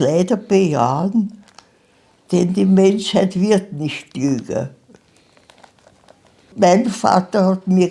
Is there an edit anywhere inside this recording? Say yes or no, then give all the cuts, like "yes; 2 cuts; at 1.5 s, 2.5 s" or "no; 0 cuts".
yes; 1 cut; at 6.5 s